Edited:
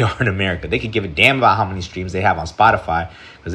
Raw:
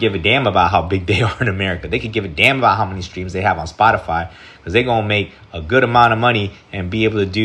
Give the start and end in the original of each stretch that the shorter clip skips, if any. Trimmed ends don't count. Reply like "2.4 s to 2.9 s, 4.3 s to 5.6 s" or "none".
none